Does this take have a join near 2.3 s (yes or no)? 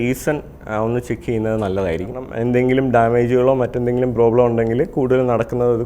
yes